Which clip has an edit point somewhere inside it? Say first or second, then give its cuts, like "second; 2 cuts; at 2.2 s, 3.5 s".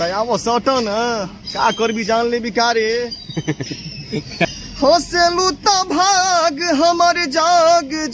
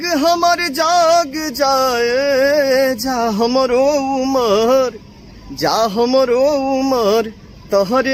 first; 1 cut; at 4.5 s